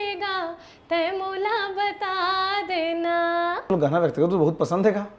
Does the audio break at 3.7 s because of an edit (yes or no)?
yes